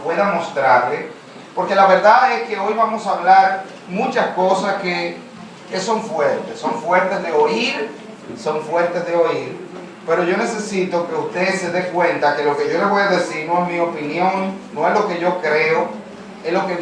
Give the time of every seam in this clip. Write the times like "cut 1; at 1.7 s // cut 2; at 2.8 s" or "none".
cut 1; at 12.0 s